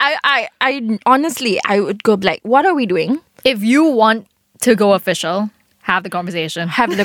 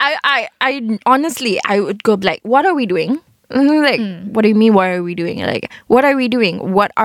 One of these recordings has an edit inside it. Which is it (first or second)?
first